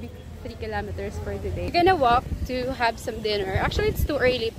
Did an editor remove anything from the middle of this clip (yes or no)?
yes